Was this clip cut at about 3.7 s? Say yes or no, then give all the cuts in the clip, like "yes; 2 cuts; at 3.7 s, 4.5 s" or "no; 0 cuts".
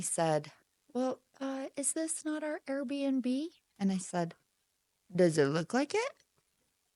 no; 0 cuts